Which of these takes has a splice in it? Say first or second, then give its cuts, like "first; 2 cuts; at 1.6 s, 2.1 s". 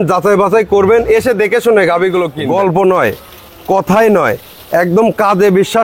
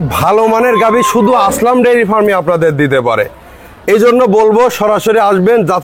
first; 1 cut; at 2.3 s